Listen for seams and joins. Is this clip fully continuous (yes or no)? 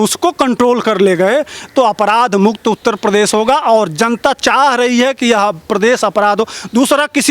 yes